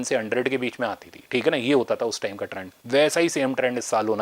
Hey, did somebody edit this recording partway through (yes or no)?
no